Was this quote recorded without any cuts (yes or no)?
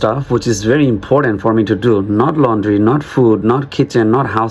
yes